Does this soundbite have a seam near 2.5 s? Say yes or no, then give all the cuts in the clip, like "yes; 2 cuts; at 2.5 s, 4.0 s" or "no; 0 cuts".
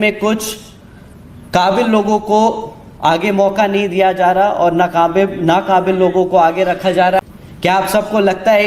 no; 1 cut; at 7.2 s